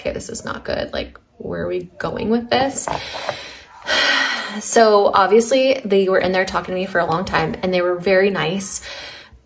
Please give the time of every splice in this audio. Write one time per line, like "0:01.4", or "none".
none